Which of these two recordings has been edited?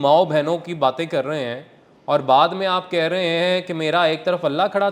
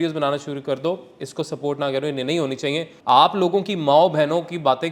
second; 1 cut; at 2.9 s

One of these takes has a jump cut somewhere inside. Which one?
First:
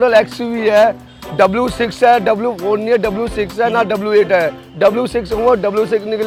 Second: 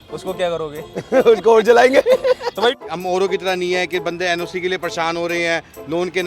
second; 1 cut; at 2.7 s

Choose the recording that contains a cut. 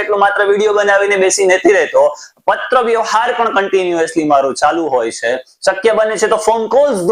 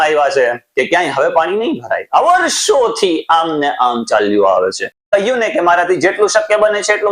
second; 1 cut; at 5.1 s

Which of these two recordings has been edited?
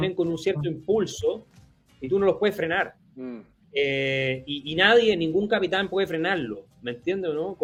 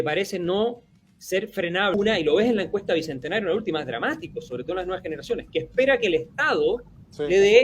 second; 1 cut; at 1.9 s

